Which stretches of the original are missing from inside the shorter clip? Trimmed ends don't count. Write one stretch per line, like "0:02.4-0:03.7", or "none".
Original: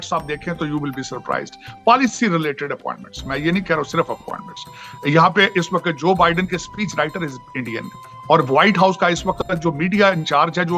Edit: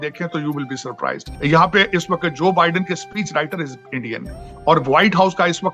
0:01.5-0:04.9